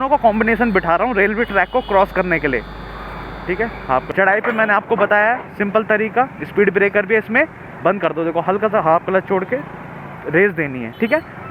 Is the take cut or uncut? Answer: cut